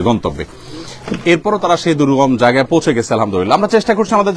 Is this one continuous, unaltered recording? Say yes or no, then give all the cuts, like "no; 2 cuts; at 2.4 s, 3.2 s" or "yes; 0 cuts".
yes; 0 cuts